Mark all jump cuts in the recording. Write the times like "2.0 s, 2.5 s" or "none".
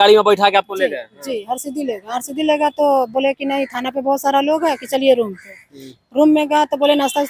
none